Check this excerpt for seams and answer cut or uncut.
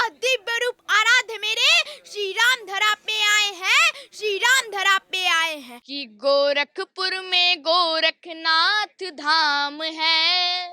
cut